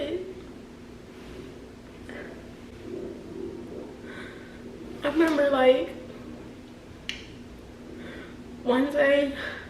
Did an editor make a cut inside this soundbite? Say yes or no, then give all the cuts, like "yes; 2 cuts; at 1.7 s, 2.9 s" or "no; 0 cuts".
no; 0 cuts